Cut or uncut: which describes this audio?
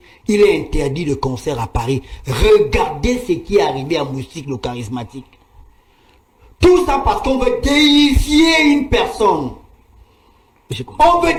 uncut